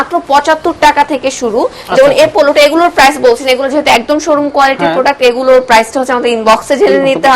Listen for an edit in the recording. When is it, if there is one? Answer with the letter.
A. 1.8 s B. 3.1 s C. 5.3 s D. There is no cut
D